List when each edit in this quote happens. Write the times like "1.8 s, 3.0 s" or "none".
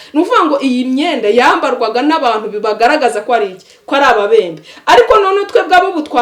none